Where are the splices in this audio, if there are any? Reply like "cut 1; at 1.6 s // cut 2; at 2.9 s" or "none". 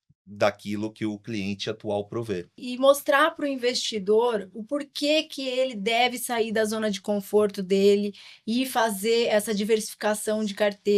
cut 1; at 2.6 s